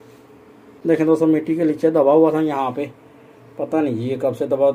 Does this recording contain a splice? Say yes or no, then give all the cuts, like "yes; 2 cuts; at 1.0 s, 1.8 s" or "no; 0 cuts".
no; 0 cuts